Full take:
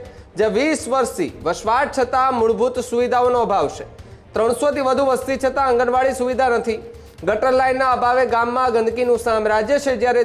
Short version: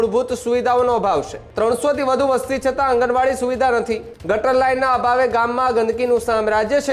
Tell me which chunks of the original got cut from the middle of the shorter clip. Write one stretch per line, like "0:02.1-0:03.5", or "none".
0:03.9-0:04.2
0:06.9-0:07.1